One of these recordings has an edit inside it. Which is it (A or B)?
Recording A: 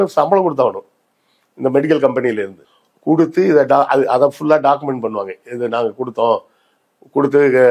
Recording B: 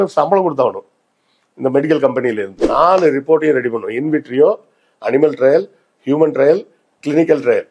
B